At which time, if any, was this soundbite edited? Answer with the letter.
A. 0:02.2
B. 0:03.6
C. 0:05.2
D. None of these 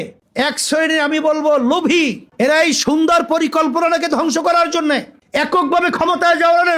C